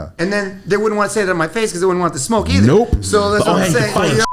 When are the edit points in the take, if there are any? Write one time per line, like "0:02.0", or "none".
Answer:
none